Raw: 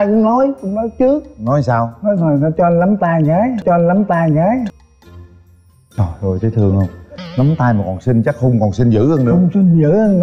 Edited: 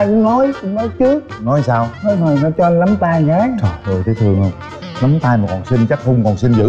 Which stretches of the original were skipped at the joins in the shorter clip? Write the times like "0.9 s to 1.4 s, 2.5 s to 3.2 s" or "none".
3.6 s to 6.0 s